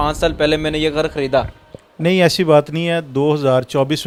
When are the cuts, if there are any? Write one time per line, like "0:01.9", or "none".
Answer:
none